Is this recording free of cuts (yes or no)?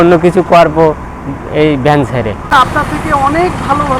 yes